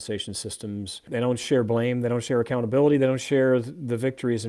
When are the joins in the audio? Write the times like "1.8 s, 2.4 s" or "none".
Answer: 1.0 s